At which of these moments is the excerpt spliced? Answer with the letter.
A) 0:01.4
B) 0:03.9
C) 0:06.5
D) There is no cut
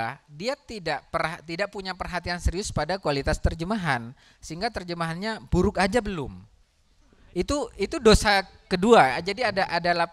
D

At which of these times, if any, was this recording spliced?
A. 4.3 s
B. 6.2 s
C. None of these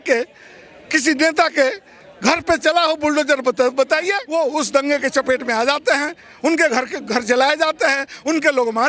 A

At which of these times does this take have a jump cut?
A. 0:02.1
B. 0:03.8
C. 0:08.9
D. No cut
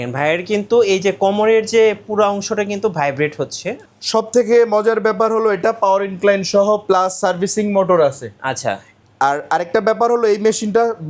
B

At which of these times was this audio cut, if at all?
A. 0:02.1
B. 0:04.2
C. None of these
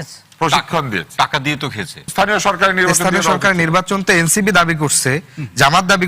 A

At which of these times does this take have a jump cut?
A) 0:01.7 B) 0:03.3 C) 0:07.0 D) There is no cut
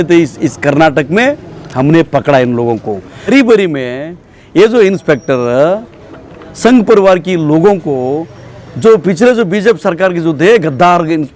B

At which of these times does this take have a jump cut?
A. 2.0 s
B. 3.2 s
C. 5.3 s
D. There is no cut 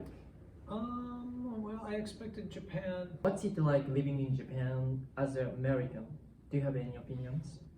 B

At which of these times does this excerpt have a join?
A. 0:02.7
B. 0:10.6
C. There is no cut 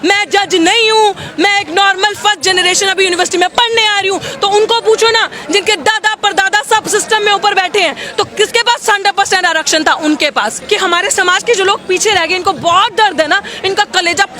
B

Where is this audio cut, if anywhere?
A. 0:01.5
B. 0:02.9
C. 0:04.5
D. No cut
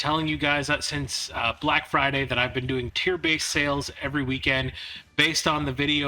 B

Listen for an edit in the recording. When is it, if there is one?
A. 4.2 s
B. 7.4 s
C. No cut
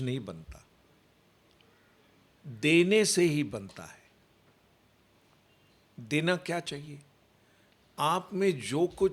C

